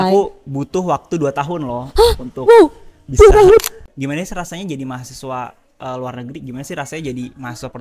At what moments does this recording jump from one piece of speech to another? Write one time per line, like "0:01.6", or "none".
0:03.8

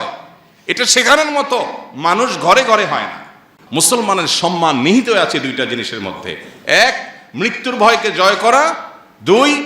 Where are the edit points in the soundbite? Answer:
0:03.5

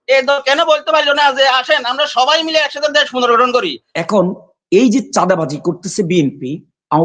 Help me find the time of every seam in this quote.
0:03.8

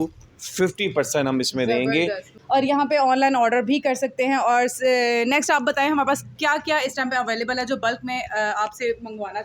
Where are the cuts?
0:02.3

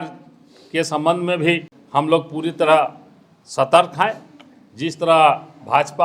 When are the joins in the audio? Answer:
0:01.8

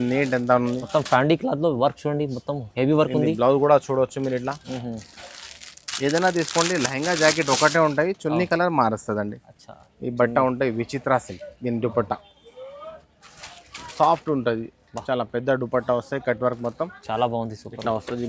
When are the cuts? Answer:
none

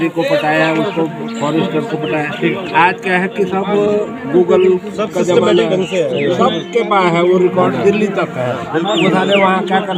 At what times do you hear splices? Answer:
none

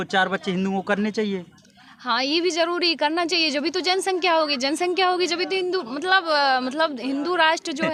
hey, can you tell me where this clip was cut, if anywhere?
none

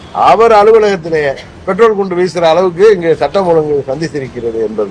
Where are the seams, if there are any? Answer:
0:01.5

